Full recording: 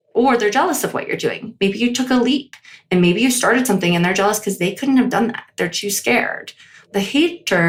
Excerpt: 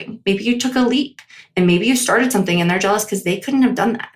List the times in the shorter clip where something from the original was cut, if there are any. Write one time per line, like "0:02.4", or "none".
none